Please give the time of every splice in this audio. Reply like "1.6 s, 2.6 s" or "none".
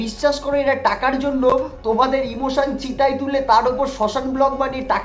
none

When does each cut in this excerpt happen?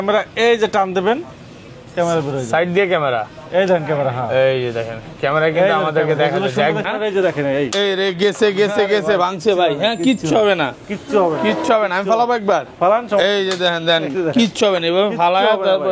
6.8 s

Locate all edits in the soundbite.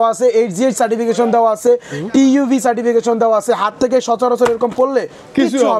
none

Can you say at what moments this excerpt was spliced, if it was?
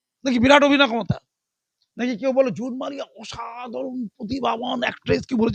none

